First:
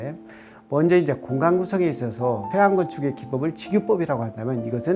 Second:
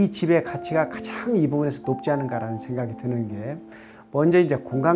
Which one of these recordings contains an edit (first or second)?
first